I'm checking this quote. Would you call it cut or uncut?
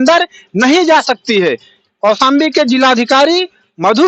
cut